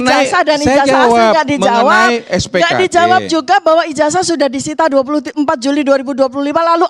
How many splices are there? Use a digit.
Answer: 0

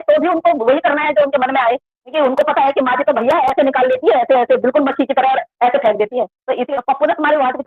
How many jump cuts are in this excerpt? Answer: 2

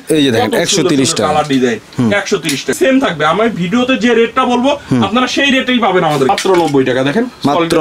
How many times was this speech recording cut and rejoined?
2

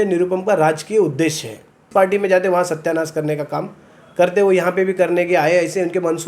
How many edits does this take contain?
1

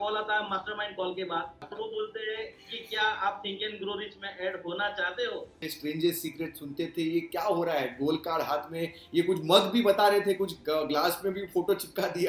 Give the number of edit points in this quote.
2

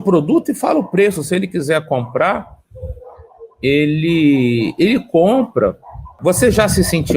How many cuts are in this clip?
1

